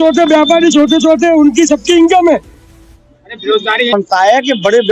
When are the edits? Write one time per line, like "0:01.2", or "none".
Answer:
0:03.9